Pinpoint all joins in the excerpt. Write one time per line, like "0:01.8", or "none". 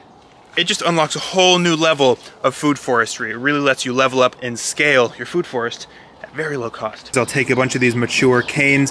0:04.5
0:07.1